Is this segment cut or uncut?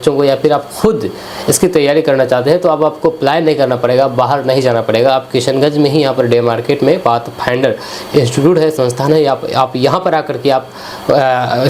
uncut